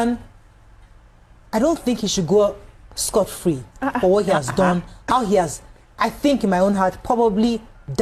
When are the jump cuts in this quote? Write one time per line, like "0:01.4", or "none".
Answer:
none